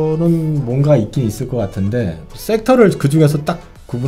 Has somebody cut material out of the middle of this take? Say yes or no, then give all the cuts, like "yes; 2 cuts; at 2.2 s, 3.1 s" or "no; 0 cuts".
no; 0 cuts